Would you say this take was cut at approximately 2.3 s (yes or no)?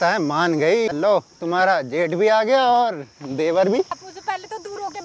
no